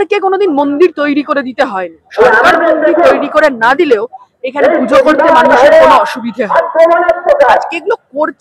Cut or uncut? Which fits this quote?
uncut